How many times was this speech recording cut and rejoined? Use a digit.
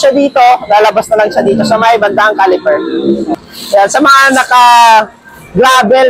1